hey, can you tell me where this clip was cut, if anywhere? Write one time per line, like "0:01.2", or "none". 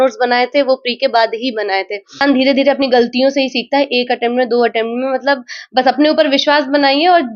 0:02.2